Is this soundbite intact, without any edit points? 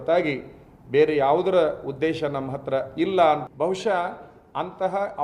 no; 1 cut; at 3.5 s

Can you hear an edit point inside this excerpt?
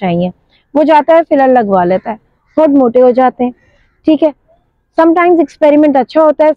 no; 0 cuts

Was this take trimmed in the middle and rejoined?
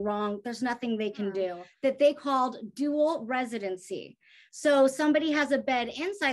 yes; 1 cut; at 1.6 s

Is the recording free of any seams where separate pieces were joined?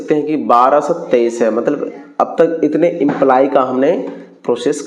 yes; 0 cuts

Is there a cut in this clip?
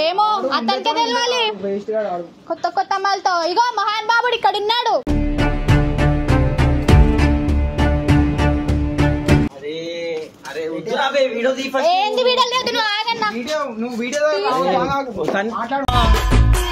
no; 0 cuts

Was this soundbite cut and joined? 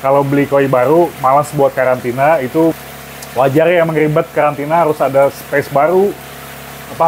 yes; 1 cut; at 2.7 s

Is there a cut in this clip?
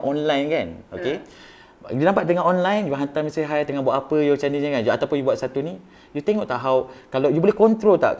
no; 0 cuts

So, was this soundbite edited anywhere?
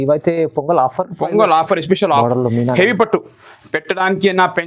yes; 1 cut; at 2.2 s

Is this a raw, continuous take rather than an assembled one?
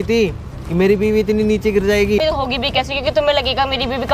no; 1 cut; at 2.2 s

